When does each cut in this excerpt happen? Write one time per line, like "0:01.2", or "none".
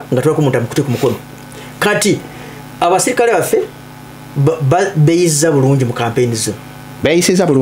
none